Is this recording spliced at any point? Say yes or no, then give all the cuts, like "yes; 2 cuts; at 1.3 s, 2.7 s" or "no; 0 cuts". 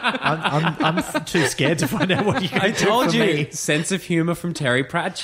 no; 0 cuts